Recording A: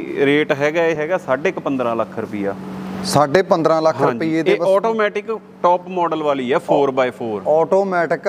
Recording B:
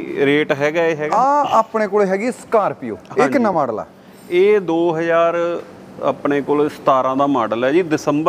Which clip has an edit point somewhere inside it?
B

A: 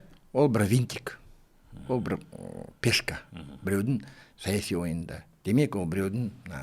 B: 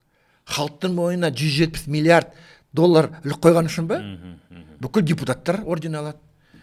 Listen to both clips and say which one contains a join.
A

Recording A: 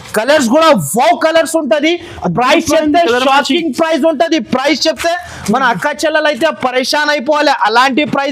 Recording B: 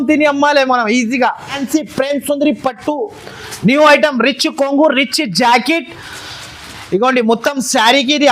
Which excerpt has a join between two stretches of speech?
B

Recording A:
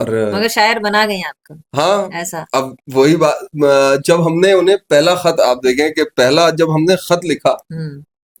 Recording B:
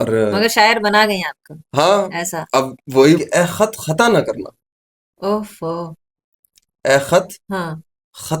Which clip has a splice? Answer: B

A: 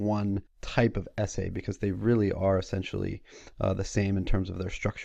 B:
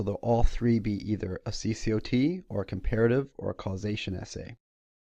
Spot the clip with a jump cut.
A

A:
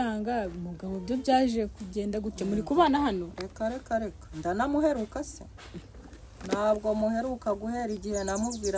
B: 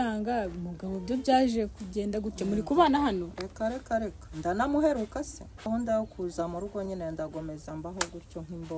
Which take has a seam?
B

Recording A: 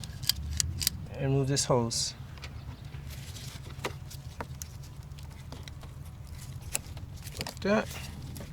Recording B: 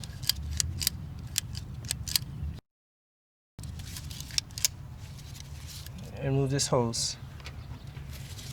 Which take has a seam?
A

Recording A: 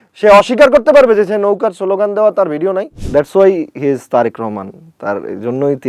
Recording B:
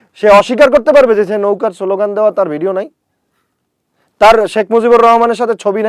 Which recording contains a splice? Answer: A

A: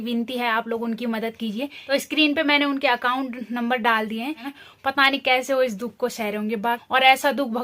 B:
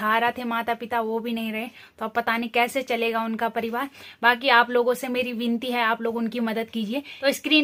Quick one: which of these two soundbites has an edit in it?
A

